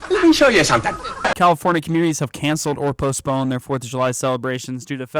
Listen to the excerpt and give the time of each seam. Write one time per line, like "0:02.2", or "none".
0:01.3